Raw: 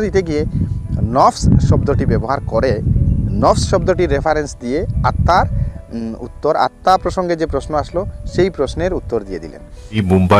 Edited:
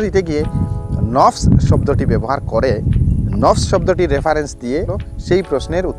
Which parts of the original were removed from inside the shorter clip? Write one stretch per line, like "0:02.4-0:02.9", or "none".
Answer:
0:04.9-0:08.0

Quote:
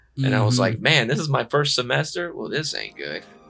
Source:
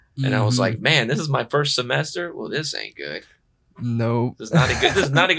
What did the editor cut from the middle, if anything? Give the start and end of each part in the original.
none

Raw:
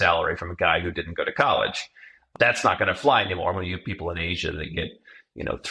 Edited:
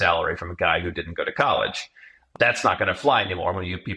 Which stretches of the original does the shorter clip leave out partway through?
none

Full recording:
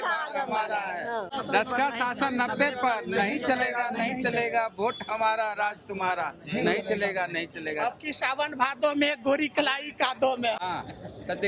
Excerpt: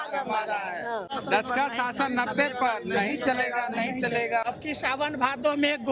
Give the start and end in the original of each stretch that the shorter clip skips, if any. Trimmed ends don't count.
0:04.7-0:07.8

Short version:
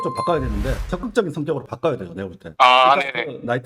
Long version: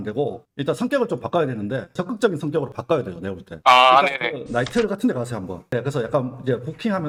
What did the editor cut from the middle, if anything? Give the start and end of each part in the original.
none

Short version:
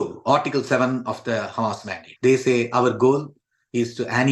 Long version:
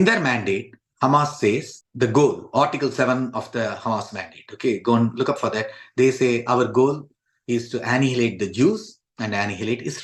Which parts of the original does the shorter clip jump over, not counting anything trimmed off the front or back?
0:04.3-0:05.8

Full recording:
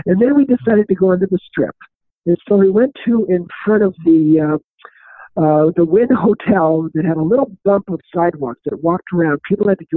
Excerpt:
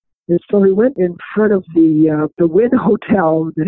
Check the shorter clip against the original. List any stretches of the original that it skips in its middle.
0:02.9-0:03.3
0:04.7-0:05.7

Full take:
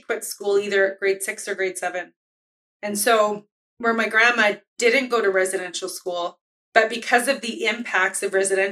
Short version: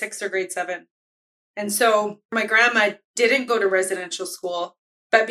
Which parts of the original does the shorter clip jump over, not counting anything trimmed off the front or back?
0:03.6-0:04.0

